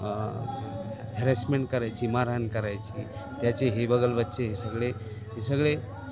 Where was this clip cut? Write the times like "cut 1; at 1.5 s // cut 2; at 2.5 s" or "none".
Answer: none